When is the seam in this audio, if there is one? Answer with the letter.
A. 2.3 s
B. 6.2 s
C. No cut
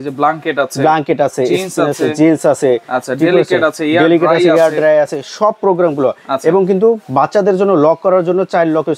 C